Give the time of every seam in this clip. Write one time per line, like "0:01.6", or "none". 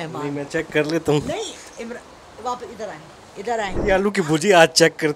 0:03.7